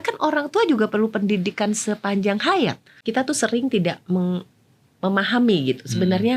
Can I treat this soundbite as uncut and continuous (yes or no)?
no